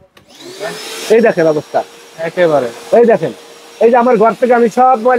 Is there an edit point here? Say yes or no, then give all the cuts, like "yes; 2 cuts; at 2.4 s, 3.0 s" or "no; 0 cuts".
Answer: no; 0 cuts